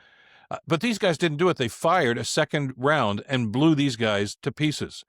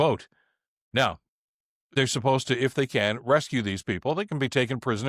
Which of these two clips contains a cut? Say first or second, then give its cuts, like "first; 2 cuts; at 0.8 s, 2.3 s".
second; 1 cut; at 1.9 s